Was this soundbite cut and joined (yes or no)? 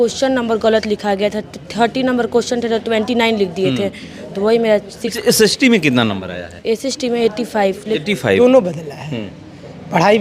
yes